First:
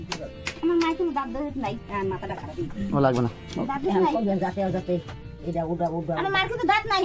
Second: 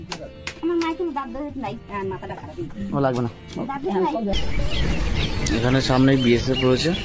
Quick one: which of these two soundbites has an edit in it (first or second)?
second